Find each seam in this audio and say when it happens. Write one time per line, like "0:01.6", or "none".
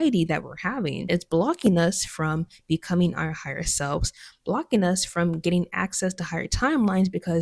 0:01.0